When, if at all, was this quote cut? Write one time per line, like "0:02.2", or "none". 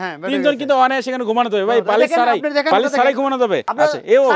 0:02.7